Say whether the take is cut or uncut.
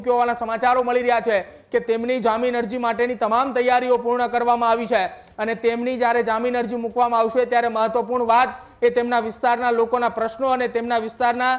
uncut